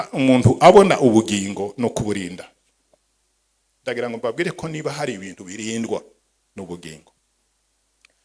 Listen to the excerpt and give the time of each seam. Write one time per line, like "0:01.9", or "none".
none

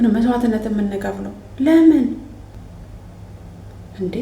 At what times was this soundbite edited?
0:02.5

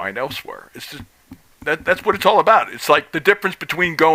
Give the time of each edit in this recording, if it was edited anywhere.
none

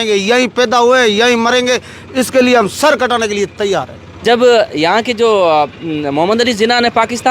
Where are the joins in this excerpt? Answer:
0:04.0

